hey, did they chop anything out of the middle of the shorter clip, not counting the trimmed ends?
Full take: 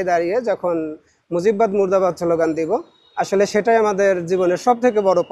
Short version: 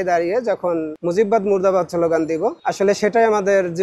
yes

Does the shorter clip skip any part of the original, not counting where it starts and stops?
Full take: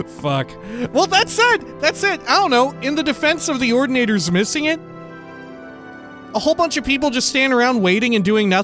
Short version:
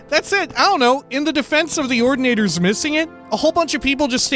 yes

